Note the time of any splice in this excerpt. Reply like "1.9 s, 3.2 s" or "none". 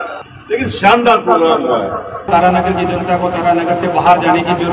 2.2 s